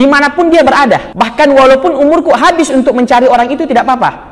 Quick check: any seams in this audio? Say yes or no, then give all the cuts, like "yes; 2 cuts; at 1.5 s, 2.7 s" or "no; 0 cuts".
yes; 1 cut; at 1.2 s